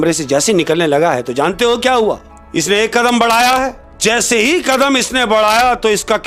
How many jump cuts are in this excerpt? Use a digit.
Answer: 2